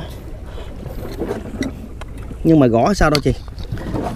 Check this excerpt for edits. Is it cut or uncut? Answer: uncut